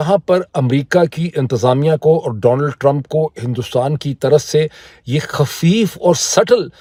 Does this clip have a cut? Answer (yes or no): no